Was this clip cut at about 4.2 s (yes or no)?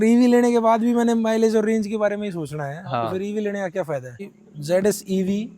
yes